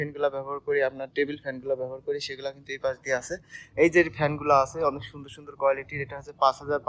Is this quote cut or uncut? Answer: uncut